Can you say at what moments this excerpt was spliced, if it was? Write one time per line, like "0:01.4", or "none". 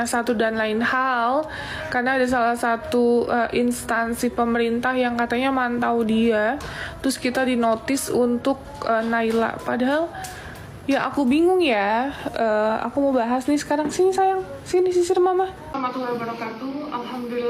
0:15.6